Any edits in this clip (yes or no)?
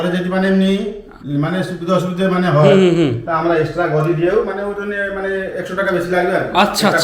no